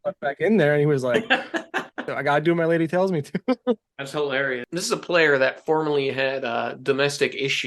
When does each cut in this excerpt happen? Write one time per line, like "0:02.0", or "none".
0:02.1
0:04.7